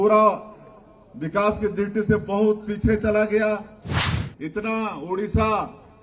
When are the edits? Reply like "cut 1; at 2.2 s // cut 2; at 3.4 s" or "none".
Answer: cut 1; at 4.1 s